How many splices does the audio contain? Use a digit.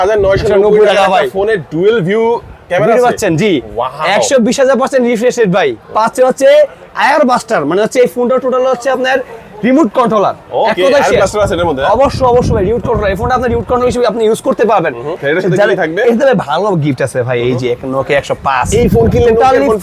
2